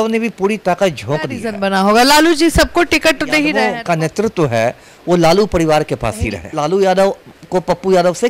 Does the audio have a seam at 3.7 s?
yes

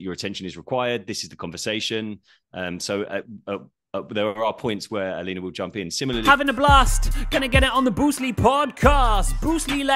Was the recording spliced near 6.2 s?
yes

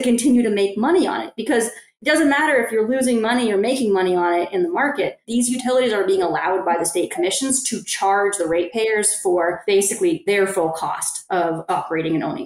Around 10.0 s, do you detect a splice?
yes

